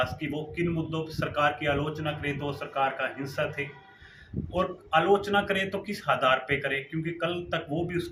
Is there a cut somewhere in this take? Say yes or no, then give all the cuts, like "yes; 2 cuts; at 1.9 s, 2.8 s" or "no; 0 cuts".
no; 0 cuts